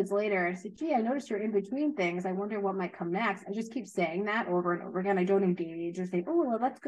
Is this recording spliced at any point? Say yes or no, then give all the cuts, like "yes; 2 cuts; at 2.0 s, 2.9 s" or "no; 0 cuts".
no; 0 cuts